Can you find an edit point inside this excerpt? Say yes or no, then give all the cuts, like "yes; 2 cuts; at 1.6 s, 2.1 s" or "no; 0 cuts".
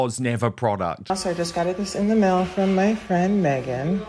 yes; 1 cut; at 1.1 s